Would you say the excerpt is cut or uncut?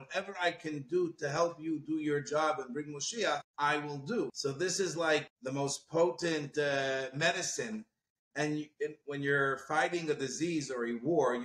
cut